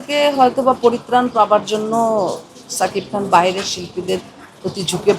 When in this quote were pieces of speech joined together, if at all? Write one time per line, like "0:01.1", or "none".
none